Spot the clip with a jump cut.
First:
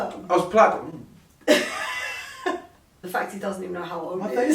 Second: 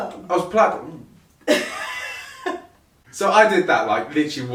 first; 1 cut; at 3.0 s

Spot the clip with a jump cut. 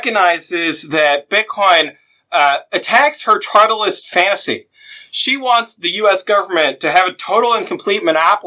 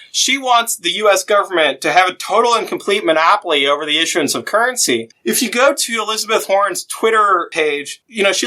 second; 1 cut; at 5.1 s

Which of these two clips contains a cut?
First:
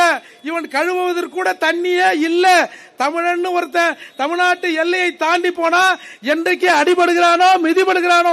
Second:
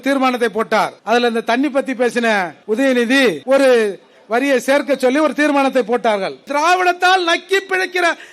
second; 4 cuts; at 1.0 s, 2.5 s, 3.4 s, 6.5 s

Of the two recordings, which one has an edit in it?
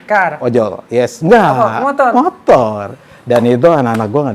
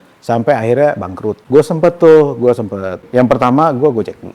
second; 2 cuts; at 1.4 s, 3.1 s

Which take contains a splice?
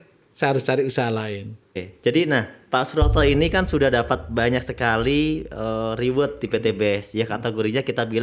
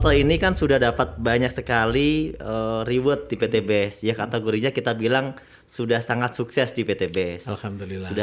first; 1 cut; at 1.9 s

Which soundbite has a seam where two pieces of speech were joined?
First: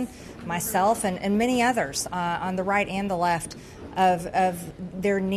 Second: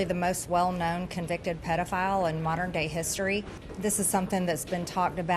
second; 1 cut; at 3.6 s

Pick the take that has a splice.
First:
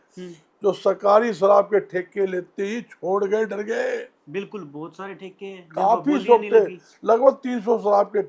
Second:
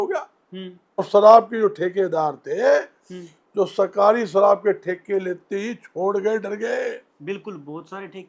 second; 1 cut; at 1.0 s

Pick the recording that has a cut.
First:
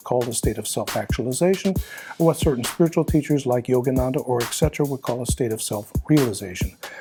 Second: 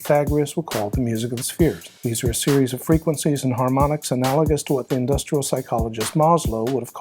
second; 1 cut; at 1.9 s

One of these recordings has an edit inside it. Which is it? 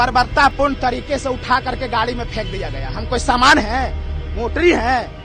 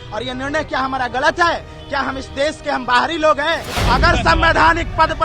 second; 1 cut; at 3.7 s

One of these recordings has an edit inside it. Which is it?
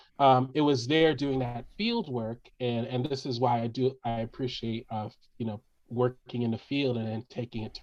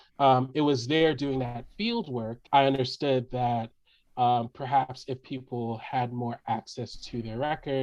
second; 1 cut; at 2.4 s

